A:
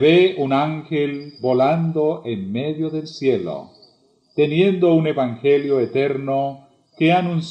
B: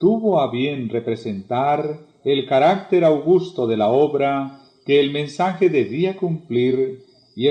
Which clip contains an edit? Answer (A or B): B